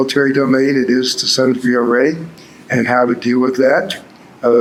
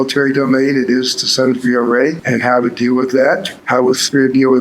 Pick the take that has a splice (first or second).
second